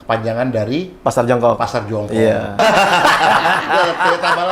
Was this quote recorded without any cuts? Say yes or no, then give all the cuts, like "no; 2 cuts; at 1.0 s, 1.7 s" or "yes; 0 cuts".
no; 1 cut; at 2.6 s